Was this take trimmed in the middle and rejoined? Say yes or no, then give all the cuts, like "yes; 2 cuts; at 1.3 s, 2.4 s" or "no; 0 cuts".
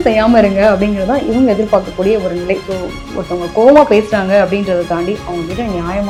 no; 0 cuts